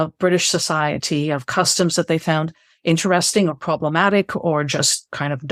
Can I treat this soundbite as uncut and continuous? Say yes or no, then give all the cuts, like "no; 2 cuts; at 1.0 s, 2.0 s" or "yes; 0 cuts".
yes; 0 cuts